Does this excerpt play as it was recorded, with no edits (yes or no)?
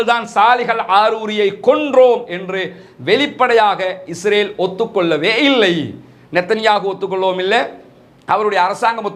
yes